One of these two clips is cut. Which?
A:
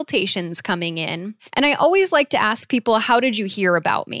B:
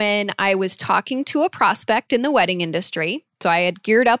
A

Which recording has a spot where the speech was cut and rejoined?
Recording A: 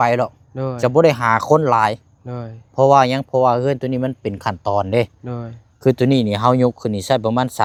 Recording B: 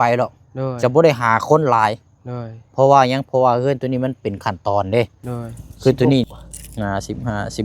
B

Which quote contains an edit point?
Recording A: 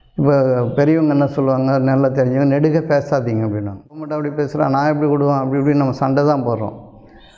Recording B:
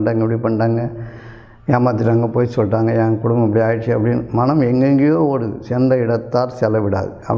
A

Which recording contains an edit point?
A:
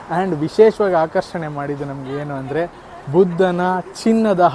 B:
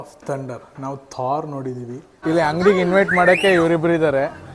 B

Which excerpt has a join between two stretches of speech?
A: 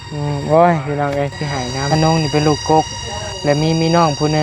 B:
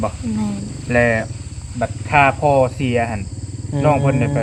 A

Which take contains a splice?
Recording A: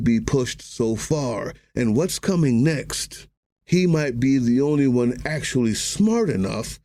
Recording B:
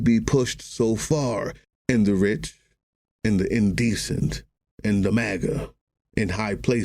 B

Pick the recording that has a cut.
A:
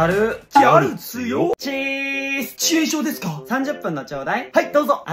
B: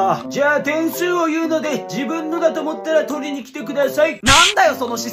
A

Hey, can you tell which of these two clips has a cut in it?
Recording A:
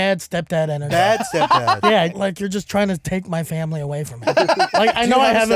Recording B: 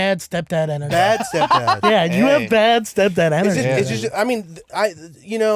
A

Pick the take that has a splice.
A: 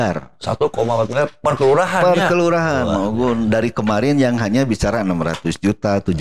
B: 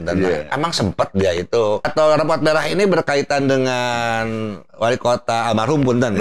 B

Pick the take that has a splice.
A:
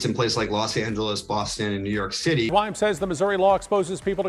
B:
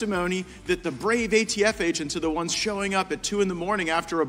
A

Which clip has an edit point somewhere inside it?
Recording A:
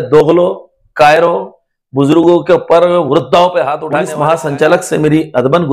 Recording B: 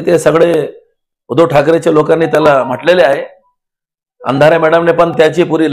A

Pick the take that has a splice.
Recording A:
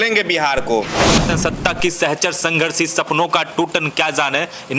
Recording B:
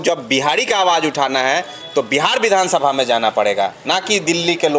A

